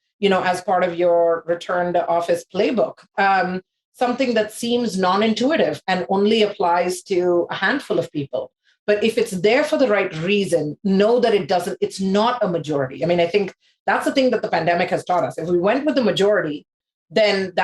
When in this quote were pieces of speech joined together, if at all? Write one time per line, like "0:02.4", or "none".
none

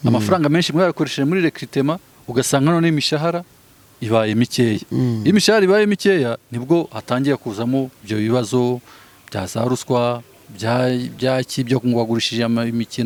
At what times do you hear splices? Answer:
none

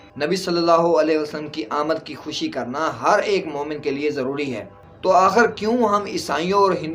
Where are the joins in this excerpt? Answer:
0:04.8

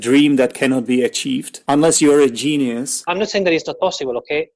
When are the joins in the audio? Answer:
0:01.5
0:03.0

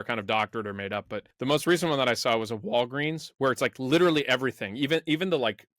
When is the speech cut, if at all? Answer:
0:01.2

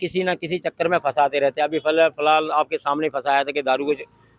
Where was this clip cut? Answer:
none

